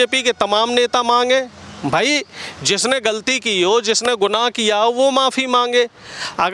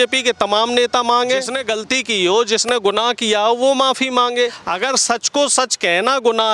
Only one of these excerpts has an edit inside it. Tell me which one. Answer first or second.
second